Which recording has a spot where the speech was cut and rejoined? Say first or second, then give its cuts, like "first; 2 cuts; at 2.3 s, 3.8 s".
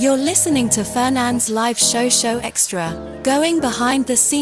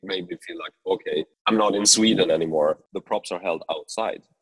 second; 2 cuts; at 1.3 s, 2.9 s